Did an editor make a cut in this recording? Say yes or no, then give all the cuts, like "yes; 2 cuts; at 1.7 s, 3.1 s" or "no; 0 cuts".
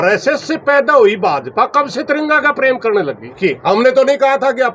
yes; 1 cut; at 3.4 s